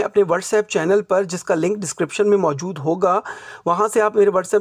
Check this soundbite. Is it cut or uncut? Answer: uncut